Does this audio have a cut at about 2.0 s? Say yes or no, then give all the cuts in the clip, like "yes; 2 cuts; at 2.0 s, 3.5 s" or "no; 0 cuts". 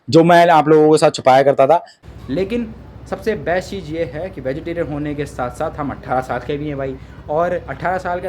yes; 1 cut; at 2.0 s